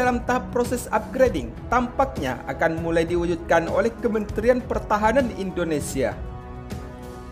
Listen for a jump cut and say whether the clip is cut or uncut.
uncut